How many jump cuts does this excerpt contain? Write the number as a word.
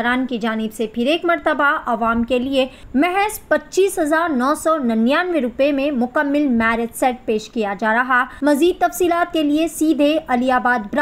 two